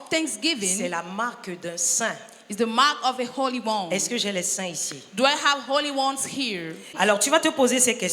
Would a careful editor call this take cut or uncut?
cut